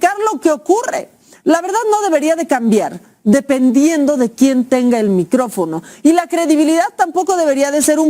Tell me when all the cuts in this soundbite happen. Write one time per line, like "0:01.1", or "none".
none